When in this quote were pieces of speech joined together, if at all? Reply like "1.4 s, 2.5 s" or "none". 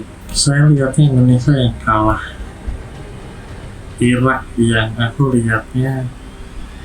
none